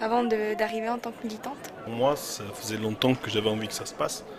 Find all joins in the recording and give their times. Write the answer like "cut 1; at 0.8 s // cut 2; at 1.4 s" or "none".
cut 1; at 1.9 s